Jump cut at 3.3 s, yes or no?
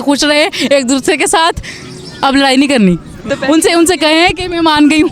yes